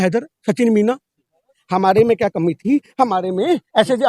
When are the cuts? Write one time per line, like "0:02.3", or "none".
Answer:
0:01.6